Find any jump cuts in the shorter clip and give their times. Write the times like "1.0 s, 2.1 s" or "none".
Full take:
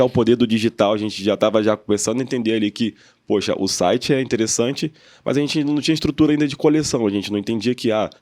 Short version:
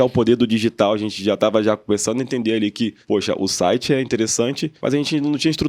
3.0 s, 4.7 s